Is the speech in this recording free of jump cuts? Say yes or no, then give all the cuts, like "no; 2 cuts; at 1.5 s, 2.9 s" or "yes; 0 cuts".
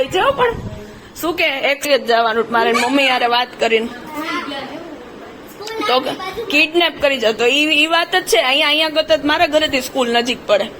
no; 1 cut; at 1.9 s